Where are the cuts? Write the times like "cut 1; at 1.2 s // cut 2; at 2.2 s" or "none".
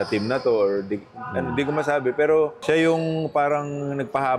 cut 1; at 2.6 s